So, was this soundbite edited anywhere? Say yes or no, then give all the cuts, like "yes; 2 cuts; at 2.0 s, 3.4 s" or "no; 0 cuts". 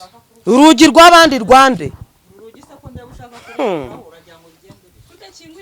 no; 0 cuts